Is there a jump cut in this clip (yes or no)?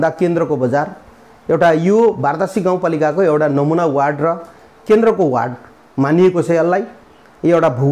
no